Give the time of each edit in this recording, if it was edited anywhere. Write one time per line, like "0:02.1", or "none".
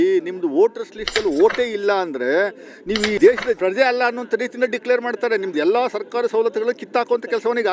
none